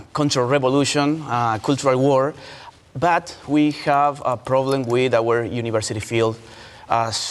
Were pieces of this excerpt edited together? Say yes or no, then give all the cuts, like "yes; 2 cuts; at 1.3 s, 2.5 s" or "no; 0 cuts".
no; 0 cuts